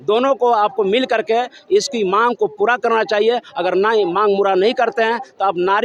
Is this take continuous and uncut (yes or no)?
yes